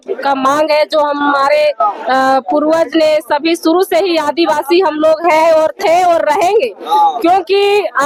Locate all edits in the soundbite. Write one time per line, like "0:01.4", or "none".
none